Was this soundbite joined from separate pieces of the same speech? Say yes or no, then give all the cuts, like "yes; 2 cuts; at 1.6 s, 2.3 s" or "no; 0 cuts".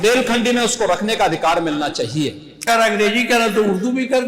yes; 1 cut; at 2.7 s